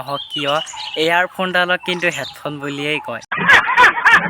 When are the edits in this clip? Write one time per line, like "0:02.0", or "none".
0:03.4